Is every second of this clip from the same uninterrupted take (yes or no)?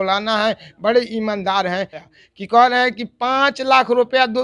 no